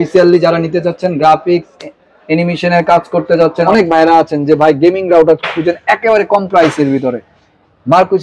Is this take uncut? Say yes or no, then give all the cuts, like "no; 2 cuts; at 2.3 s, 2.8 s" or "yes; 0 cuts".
no; 1 cut; at 3.6 s